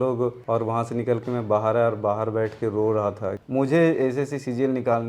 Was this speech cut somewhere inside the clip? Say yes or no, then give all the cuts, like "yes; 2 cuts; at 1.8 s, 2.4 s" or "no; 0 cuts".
yes; 1 cut; at 3.4 s